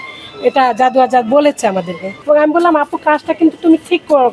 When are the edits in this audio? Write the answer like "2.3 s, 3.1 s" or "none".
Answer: 2.1 s